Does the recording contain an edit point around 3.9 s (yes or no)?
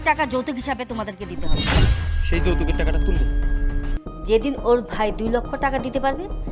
yes